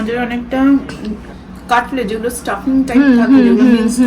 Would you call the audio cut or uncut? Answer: cut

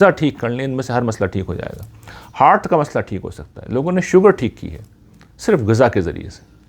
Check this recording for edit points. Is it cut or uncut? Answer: uncut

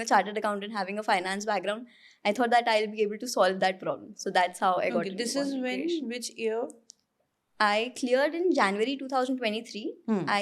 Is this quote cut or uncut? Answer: uncut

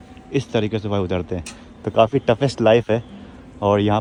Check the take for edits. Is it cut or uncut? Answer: uncut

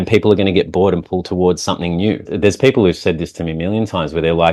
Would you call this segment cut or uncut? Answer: cut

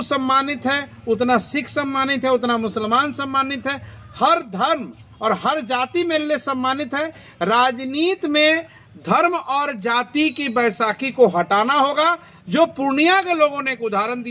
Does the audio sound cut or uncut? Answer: uncut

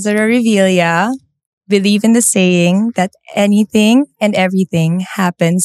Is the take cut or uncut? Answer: uncut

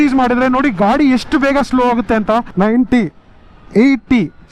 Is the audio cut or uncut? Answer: cut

